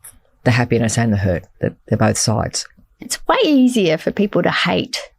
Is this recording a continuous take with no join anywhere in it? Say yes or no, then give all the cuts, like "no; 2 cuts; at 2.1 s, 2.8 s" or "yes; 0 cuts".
no; 1 cut; at 3.0 s